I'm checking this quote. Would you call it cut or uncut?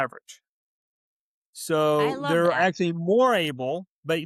uncut